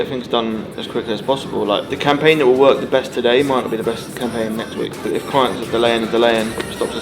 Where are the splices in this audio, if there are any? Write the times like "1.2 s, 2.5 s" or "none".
1.9 s, 5.1 s